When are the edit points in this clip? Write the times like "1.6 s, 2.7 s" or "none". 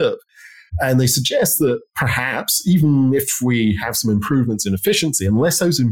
none